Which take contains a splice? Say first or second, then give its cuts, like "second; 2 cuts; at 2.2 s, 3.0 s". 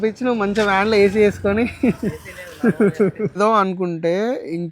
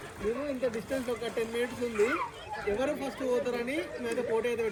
first; 1 cut; at 3.3 s